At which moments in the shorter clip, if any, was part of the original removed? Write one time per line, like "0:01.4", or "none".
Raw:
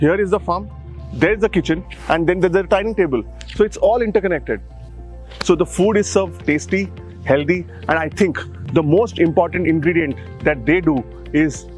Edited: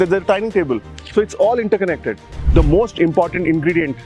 0:02.3